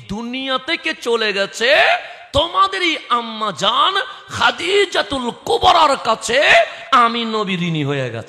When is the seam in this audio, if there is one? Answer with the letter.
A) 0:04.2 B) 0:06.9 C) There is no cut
C